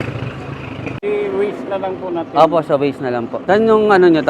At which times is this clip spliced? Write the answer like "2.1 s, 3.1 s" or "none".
3.3 s